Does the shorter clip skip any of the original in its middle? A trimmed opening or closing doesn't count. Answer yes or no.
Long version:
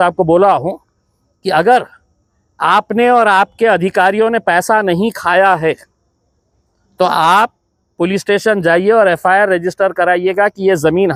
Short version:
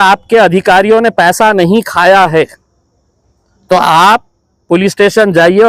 no